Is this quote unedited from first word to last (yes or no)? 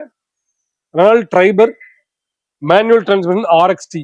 yes